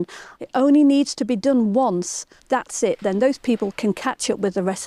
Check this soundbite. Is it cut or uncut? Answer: uncut